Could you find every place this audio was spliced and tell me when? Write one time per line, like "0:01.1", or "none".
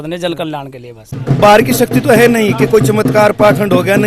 0:01.2